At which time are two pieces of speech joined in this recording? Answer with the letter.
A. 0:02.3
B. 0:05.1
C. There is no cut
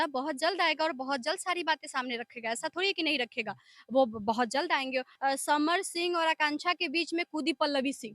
B